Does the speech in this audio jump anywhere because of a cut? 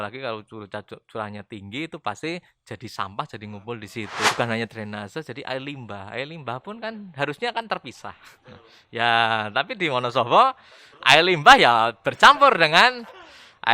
yes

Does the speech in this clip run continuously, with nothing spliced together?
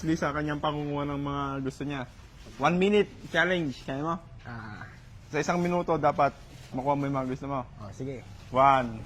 yes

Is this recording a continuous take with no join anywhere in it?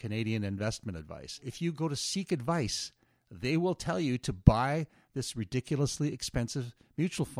no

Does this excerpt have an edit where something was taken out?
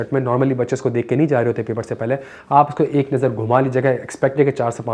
no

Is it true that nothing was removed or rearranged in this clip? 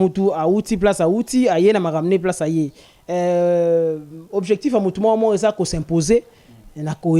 yes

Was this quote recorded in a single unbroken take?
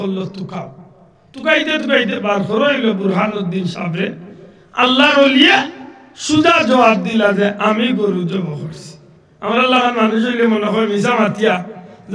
yes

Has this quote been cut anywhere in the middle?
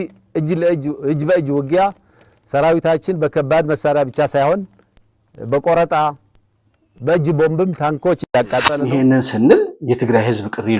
yes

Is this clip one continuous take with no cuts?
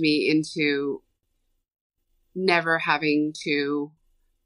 yes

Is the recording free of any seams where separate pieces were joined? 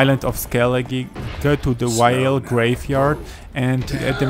yes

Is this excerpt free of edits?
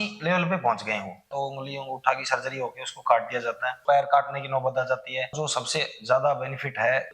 no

